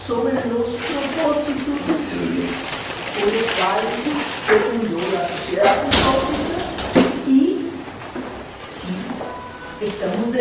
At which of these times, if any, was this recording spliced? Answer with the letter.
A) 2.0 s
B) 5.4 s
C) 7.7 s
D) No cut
D